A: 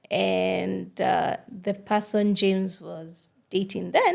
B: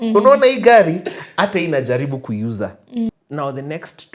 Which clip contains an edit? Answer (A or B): B